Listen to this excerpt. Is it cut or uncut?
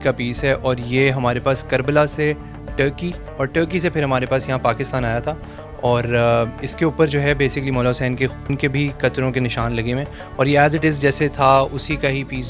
uncut